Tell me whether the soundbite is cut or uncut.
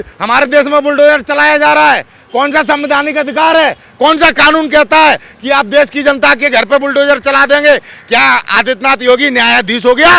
uncut